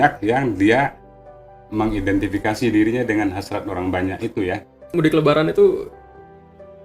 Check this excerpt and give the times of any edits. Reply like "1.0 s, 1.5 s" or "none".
4.9 s